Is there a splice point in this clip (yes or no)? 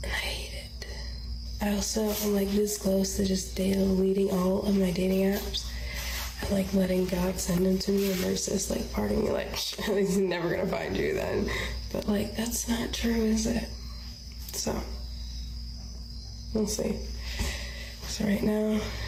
no